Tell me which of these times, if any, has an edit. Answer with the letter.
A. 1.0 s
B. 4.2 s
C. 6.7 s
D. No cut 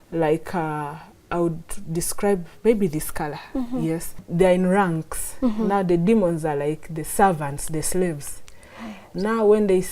B